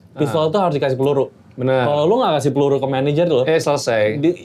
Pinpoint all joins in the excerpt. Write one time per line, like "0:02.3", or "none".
none